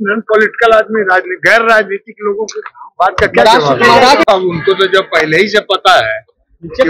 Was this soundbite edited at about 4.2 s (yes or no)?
yes